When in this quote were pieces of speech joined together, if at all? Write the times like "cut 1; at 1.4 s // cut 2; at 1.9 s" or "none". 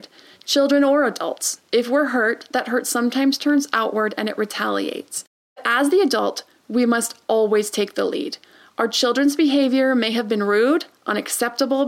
cut 1; at 5.6 s